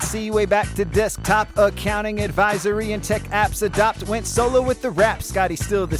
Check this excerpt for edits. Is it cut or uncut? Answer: uncut